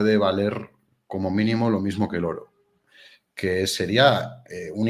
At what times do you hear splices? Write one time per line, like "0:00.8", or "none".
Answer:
none